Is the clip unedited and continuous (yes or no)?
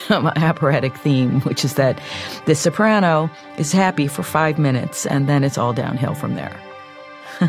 yes